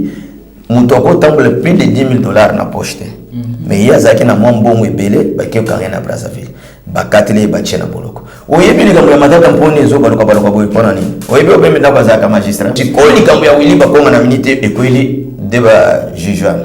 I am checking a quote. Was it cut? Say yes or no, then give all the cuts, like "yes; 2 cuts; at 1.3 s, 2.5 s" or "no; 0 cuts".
yes; 1 cut; at 12.8 s